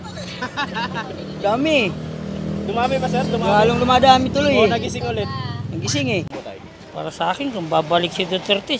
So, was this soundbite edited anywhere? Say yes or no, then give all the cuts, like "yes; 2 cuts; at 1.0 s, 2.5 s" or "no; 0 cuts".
yes; 1 cut; at 6.3 s